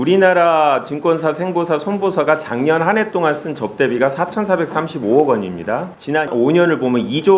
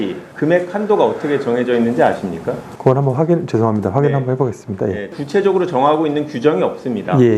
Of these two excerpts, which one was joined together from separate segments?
second; 1 cut; at 5.1 s

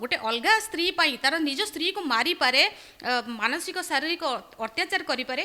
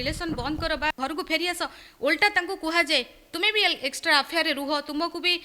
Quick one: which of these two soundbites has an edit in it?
second; 1 cut; at 1.0 s

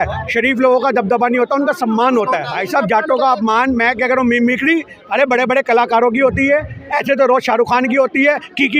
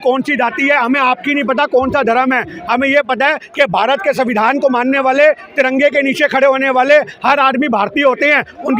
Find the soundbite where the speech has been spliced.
first; 1 cut; at 2.5 s

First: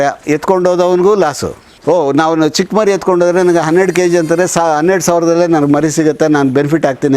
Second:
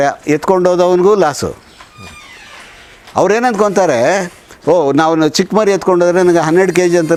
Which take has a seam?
first; 1 cut; at 1.6 s

